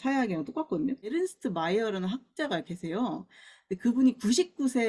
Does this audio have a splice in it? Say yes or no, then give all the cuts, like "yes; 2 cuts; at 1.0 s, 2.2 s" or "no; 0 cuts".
yes; 1 cut; at 1.1 s